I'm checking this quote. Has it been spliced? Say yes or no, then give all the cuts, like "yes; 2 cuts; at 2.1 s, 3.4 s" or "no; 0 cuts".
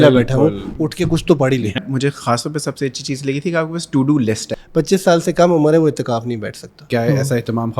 yes; 3 cuts; at 1.8 s, 4.6 s, 6.9 s